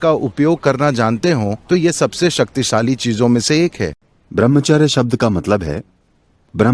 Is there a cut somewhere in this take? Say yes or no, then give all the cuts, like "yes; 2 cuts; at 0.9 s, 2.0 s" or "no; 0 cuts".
yes; 1 cut; at 3.9 s